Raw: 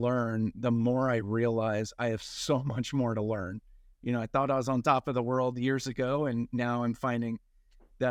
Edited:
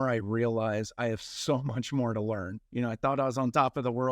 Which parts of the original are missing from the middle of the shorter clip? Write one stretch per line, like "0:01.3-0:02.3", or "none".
0:03.6-0:03.9

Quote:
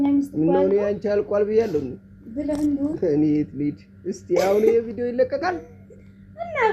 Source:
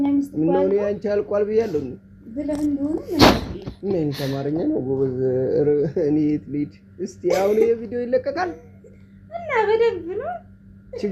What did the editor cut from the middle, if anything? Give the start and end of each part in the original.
0:03.0-0:05.9

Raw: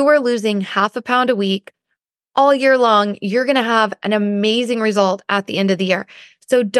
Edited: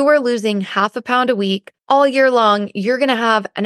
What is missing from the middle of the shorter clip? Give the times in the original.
0:01.7-0:02.2

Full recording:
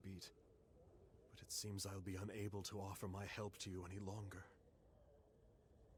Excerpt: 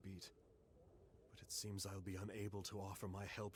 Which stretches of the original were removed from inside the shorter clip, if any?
none

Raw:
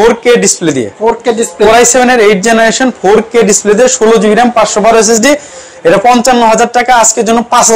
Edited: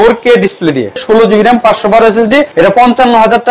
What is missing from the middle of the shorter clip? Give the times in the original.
0:01.0-0:03.9
0:05.4-0:05.8

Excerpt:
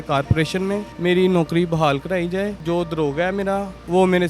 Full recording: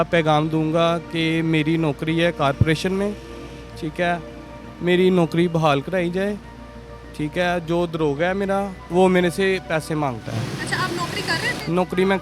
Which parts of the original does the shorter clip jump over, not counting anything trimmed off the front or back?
0:03.2-0:04.7
0:06.4-0:07.6

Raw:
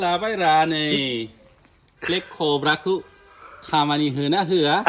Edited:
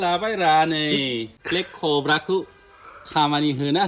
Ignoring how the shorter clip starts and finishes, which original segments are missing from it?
0:01.3-0:01.9

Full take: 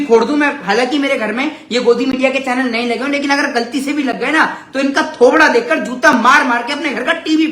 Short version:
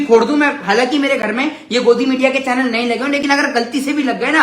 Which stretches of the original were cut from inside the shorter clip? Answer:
none

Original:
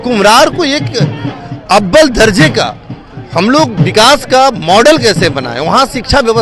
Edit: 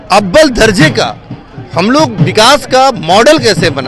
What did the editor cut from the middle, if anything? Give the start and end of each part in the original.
none

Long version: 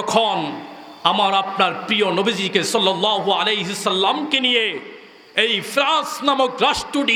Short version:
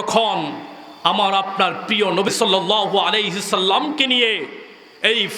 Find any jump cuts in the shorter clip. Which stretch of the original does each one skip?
0:02.3-0:02.7

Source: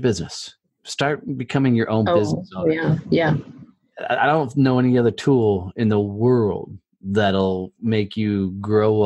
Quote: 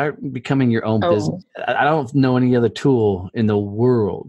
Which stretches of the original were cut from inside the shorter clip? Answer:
0:02.5-0:03.8

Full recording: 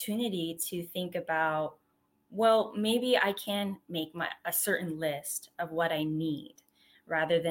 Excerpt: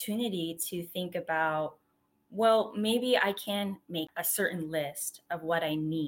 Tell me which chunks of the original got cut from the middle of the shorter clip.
0:04.1-0:04.4

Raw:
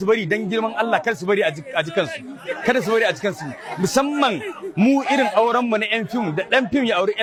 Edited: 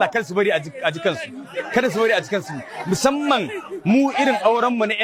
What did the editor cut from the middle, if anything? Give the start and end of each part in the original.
none

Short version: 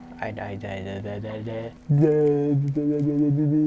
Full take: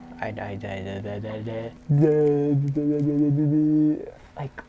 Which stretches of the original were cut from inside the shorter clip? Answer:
none

